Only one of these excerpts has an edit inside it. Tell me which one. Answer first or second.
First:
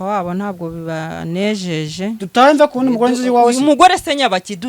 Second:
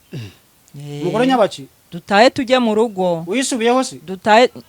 first